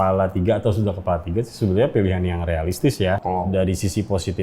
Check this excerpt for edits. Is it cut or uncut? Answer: cut